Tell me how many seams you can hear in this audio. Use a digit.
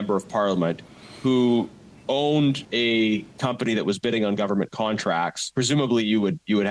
2